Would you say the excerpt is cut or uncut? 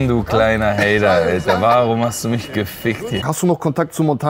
cut